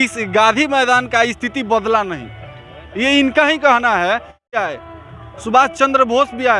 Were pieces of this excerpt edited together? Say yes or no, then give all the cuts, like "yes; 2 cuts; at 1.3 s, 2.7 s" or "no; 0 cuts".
yes; 1 cut; at 4.5 s